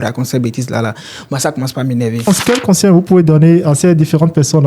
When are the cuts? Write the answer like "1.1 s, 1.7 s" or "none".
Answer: 2.2 s

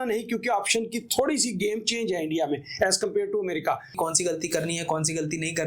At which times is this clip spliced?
3.9 s

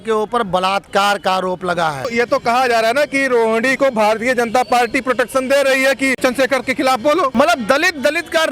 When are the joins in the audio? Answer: 2.1 s, 6.2 s, 7.3 s

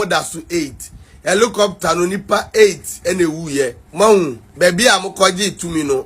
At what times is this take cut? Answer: 3.8 s, 4.4 s

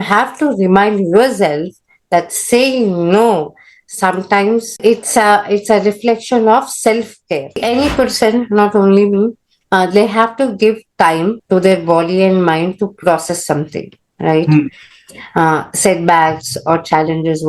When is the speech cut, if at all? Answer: 4.8 s, 7.6 s

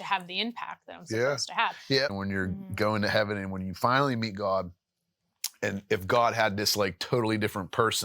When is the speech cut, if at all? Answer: 2.2 s

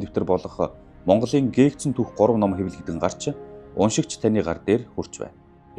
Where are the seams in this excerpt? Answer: none

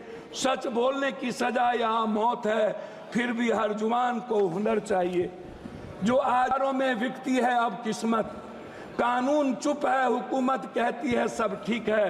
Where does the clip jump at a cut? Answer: 6.5 s

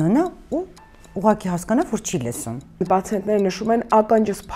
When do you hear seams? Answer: 2.8 s

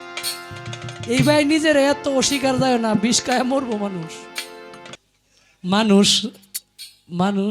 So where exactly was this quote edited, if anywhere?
5.0 s

